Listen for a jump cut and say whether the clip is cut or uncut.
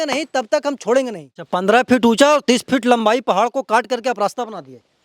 cut